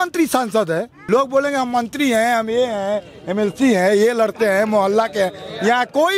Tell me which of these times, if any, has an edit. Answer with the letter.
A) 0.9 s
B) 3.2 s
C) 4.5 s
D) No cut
A